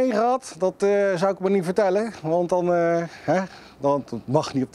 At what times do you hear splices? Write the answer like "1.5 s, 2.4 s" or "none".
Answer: none